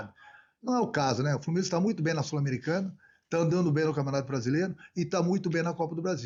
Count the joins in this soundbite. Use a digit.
0